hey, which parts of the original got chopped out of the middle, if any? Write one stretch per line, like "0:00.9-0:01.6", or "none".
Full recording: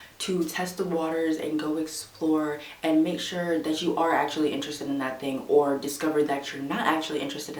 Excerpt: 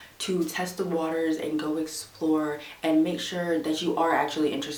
none